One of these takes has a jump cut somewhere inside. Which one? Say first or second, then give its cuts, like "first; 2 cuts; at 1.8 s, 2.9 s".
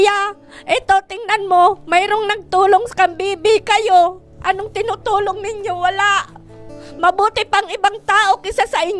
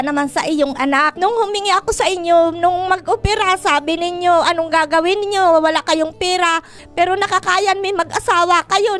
second; 2 cuts; at 1.1 s, 6.8 s